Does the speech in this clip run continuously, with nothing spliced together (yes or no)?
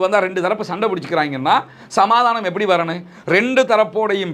yes